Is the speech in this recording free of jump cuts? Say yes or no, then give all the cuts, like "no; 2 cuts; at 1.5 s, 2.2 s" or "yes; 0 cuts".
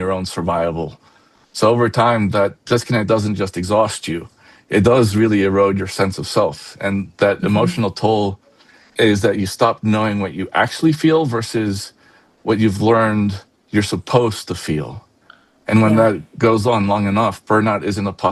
yes; 0 cuts